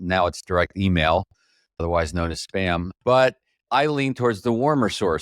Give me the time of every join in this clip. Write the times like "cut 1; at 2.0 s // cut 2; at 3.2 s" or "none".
cut 1; at 2.9 s